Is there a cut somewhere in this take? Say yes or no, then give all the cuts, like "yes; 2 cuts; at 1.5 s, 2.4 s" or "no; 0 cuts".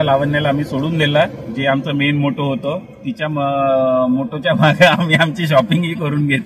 no; 0 cuts